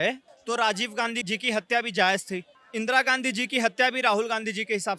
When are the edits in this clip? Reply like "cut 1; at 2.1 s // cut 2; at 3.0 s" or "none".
cut 1; at 2.5 s